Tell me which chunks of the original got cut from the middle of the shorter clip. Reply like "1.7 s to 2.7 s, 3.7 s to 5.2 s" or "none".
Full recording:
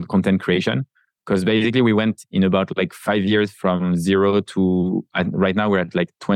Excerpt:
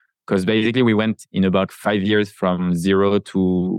2.7 s to 2.9 s